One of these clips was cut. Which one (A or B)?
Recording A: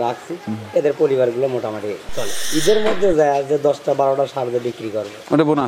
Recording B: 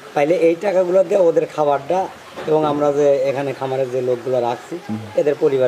A